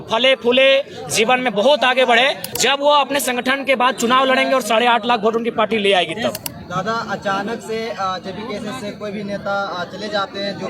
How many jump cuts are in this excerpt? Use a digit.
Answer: 2